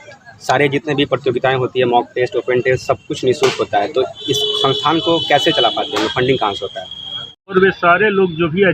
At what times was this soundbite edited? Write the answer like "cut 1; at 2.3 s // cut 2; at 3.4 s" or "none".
cut 1; at 7.5 s